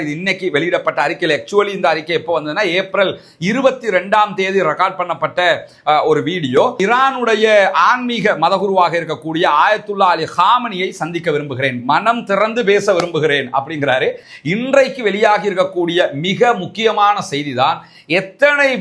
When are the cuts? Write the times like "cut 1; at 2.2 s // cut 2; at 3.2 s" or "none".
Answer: cut 1; at 6.7 s // cut 2; at 14.3 s

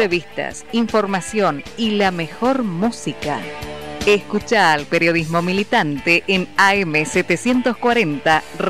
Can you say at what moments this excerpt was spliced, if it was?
none

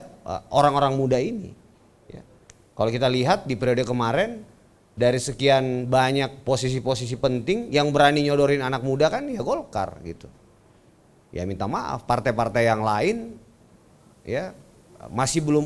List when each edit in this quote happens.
none

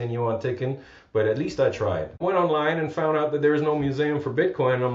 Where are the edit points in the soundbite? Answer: cut 1; at 2.2 s

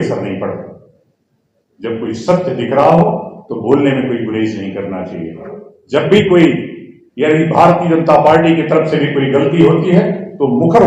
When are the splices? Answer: cut 1; at 5.5 s

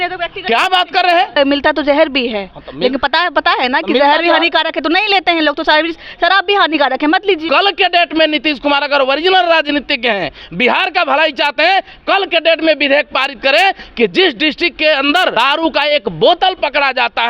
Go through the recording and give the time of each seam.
cut 1; at 1.4 s // cut 2; at 7.4 s // cut 3; at 15.3 s

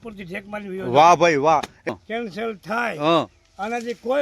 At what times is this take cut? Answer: cut 1; at 1.9 s

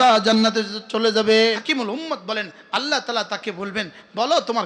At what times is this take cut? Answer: cut 1; at 1.6 s

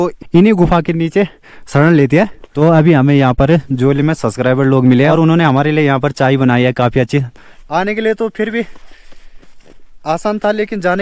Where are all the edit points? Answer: cut 1; at 2.4 s // cut 2; at 5.1 s // cut 3; at 7.5 s

